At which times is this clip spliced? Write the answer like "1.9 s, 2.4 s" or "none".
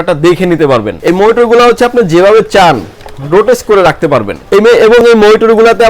0.9 s, 4.4 s